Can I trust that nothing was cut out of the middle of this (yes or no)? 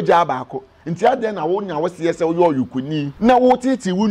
no